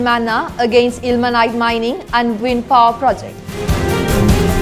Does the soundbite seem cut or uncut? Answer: cut